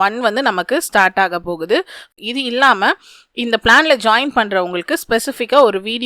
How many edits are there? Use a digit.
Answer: 1